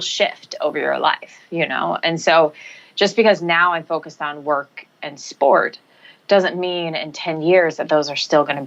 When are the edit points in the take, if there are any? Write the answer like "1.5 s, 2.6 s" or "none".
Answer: none